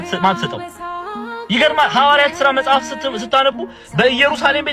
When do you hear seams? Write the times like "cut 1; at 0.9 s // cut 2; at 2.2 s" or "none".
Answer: none